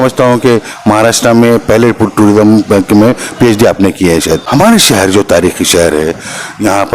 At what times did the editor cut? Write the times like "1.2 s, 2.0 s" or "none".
4.4 s